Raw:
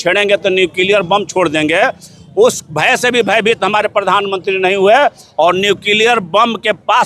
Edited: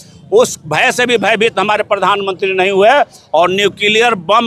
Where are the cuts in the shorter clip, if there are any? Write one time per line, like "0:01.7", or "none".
none